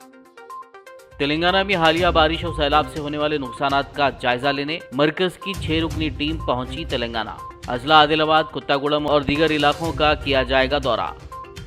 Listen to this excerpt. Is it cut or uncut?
uncut